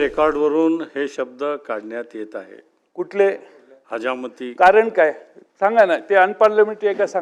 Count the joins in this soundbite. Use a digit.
0